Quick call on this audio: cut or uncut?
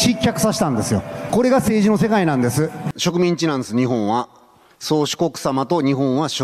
cut